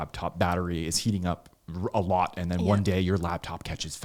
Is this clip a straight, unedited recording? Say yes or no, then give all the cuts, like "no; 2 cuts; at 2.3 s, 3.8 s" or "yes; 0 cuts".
yes; 0 cuts